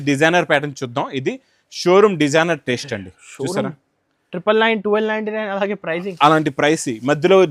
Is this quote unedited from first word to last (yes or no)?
yes